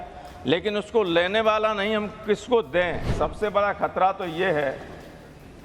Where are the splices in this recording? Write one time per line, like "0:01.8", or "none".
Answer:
0:03.1